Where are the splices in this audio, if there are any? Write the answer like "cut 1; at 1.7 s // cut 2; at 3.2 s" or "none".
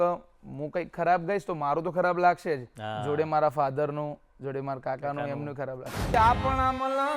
cut 1; at 6.1 s